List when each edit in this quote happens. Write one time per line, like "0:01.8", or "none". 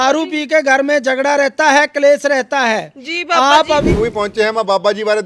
0:04.0